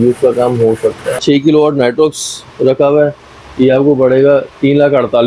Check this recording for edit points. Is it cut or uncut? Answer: cut